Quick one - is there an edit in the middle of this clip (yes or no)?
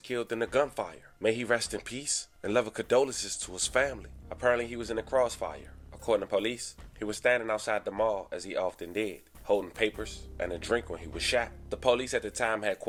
no